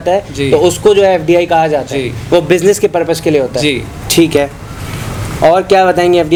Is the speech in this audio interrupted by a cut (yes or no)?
no